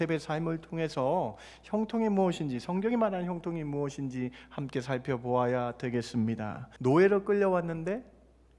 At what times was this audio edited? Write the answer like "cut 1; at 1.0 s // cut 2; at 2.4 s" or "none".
cut 1; at 6.6 s